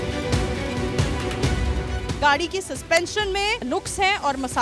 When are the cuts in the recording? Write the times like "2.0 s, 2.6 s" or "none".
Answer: 2.1 s